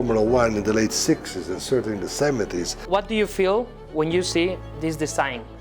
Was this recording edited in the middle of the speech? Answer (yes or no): yes